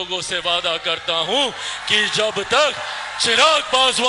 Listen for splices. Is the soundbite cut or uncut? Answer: uncut